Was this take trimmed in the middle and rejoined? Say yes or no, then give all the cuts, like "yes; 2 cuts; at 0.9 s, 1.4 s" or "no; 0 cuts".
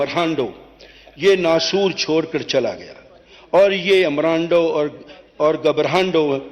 no; 0 cuts